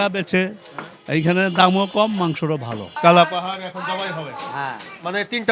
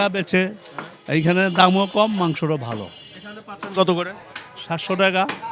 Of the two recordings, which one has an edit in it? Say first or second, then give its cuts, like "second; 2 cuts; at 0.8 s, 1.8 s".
first; 1 cut; at 2.9 s